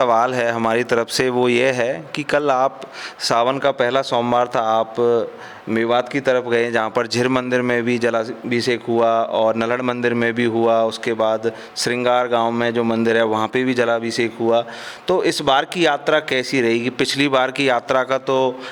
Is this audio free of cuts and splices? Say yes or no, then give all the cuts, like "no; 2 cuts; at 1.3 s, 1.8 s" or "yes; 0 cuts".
yes; 0 cuts